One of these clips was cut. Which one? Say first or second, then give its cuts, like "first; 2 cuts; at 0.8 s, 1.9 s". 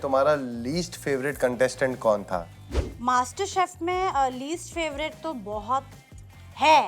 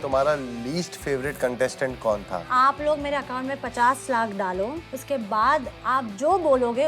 second; 2 cuts; at 2.5 s, 4.9 s